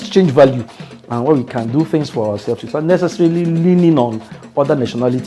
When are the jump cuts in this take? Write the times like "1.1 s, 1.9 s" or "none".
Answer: none